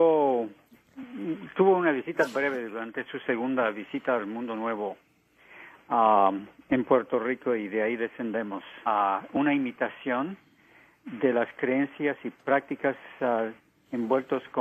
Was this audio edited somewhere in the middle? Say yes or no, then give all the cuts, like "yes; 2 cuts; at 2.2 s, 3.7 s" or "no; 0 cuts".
no; 0 cuts